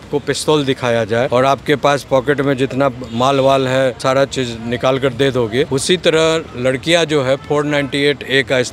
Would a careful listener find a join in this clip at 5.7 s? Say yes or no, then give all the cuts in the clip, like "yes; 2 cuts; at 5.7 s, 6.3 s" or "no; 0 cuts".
yes; 3 cuts; at 1.3 s, 4.0 s, 5.7 s